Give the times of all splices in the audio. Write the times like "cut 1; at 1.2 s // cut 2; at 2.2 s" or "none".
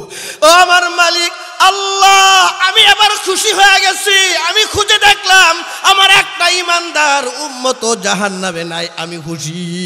none